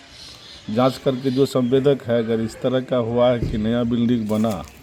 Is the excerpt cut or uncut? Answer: uncut